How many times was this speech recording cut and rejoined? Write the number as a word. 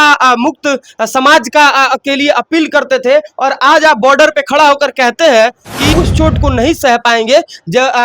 one